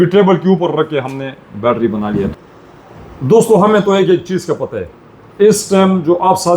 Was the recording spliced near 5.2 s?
no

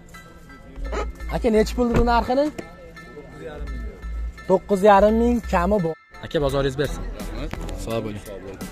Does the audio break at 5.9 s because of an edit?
yes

